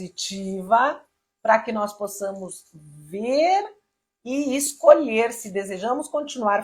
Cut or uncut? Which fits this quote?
uncut